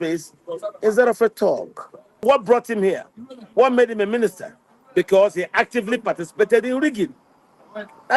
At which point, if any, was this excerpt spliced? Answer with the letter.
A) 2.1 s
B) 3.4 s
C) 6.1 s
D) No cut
A